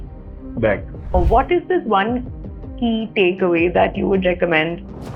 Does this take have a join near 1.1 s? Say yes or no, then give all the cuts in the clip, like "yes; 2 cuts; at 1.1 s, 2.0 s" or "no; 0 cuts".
yes; 1 cut; at 1.1 s